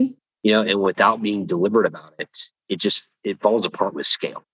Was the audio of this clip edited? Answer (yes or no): no